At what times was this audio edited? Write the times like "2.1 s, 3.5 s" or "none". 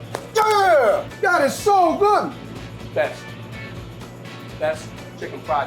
2.4 s